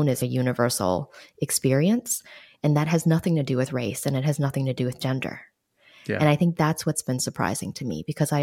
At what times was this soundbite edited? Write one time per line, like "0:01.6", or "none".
none